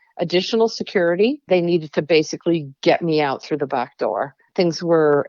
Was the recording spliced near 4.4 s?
yes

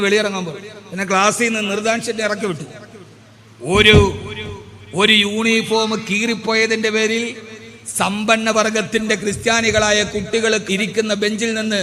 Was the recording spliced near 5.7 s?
no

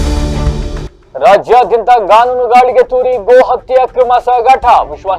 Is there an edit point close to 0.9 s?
yes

